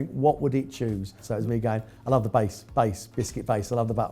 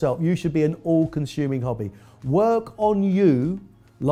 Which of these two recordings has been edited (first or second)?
first